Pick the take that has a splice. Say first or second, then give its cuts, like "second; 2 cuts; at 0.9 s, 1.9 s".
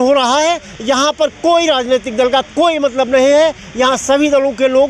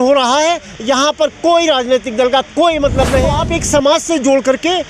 second; 1 cut; at 3.3 s